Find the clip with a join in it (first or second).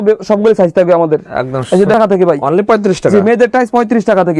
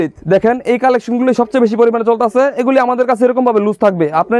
first